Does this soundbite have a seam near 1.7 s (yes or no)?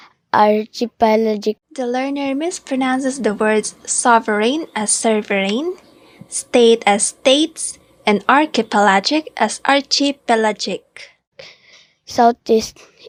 no